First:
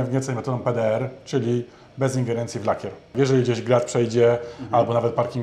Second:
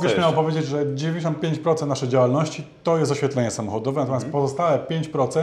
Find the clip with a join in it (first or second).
first